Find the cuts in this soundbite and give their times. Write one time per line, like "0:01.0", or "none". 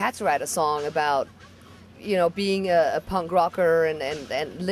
0:02.4